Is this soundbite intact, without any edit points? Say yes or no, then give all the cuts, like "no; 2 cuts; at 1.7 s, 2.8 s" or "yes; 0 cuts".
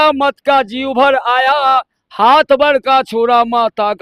yes; 0 cuts